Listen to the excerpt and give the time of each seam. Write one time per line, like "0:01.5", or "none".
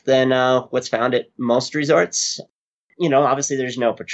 0:02.8